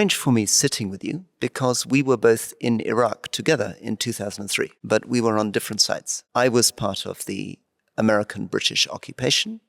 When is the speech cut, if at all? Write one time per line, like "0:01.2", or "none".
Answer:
0:04.8
0:06.2